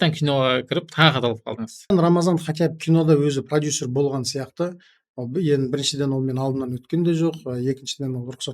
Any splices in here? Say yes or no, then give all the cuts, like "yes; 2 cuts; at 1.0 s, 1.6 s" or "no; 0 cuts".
yes; 1 cut; at 1.9 s